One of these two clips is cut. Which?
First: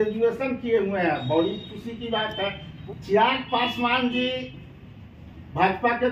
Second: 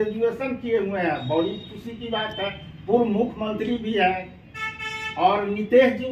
first; 1 cut; at 2.7 s

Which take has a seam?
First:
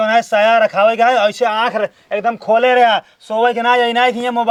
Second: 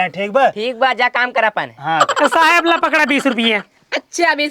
second; 1 cut; at 2.1 s

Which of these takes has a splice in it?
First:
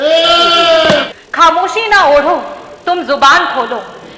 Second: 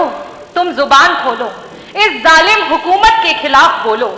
first; 1 cut; at 1.1 s

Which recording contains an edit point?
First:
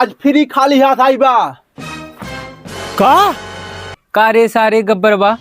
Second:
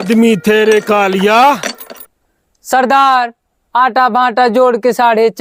first; 1 cut; at 3.9 s

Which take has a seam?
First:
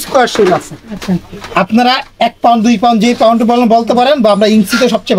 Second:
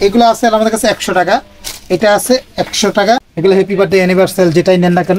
second; 1 cut; at 3.3 s

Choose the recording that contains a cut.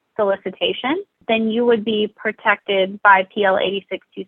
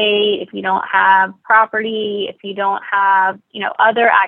first; 1 cut; at 1.1 s

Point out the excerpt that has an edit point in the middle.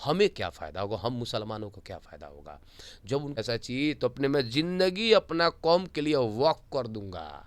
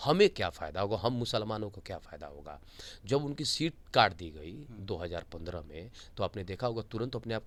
first; 1 cut; at 3.4 s

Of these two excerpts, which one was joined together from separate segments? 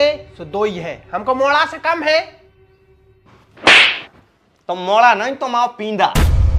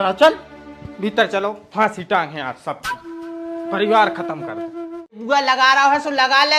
second; 1 cut; at 5.2 s

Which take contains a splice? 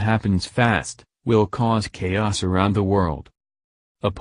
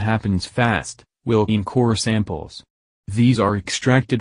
first; 1 cut; at 1.5 s

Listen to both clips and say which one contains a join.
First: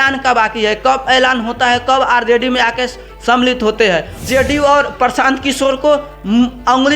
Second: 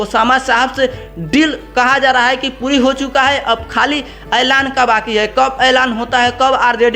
first; 1 cut; at 4.1 s

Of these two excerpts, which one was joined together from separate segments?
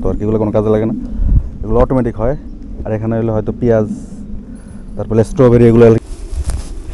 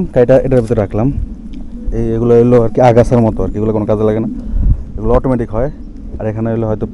first; 1 cut; at 6.0 s

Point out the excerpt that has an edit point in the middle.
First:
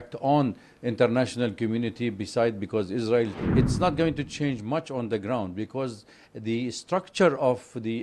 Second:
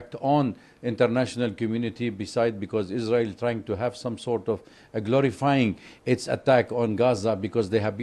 first; 1 cut; at 3.3 s

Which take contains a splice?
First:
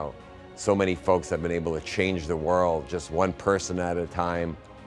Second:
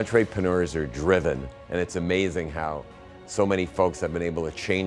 second; 1 cut; at 1.5 s

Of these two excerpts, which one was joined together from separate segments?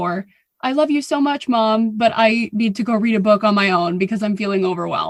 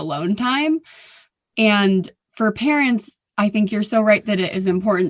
second; 1 cut; at 2.2 s

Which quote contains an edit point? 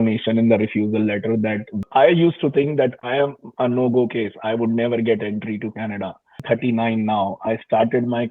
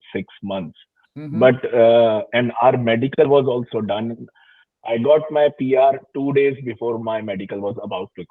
first; 2 cuts; at 1.7 s, 6.4 s

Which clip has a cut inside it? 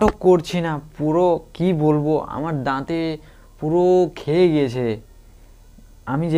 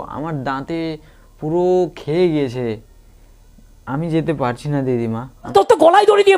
second; 1 cut; at 5.3 s

